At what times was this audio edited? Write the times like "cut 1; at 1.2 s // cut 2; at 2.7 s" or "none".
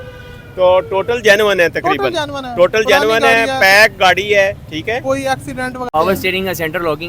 cut 1; at 5.9 s